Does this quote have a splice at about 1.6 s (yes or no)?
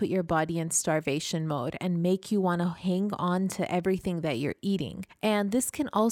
no